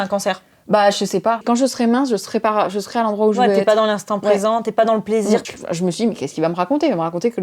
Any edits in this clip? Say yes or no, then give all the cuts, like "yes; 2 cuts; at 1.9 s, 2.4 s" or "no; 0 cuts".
yes; 2 cuts; at 1.4 s, 5.4 s